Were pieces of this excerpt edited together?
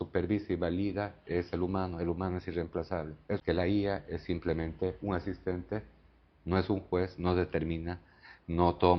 yes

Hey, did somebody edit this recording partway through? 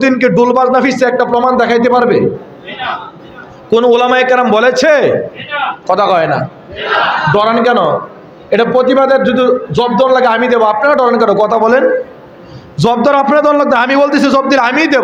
no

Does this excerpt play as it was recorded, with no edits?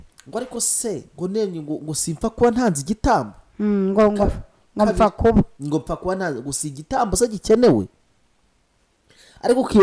yes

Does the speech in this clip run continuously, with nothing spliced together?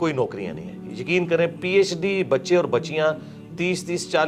yes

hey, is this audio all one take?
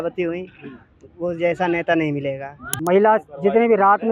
no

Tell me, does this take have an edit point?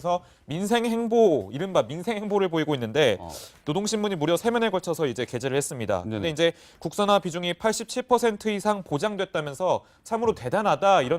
yes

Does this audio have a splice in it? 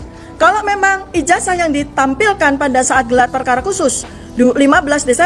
no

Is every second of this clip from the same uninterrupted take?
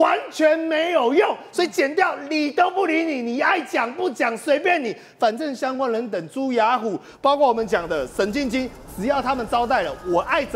yes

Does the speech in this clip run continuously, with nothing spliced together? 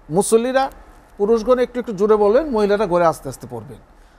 yes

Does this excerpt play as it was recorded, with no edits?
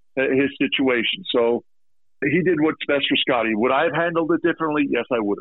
yes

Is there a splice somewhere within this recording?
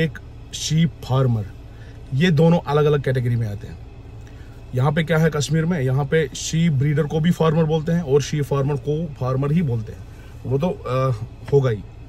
no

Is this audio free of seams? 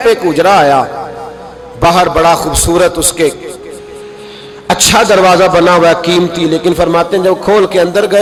yes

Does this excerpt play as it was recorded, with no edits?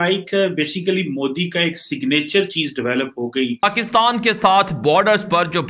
no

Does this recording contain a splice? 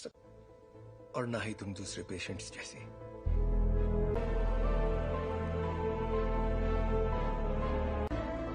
yes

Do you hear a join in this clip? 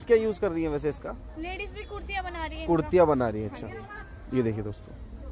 no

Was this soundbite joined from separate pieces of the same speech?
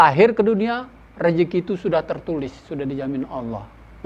no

